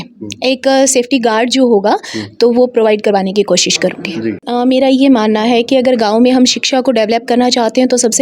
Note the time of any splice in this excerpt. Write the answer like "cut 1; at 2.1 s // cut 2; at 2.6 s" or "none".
cut 1; at 4.4 s